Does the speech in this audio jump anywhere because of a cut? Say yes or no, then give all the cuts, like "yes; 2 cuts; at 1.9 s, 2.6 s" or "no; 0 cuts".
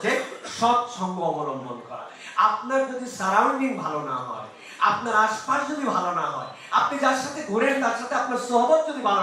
no; 0 cuts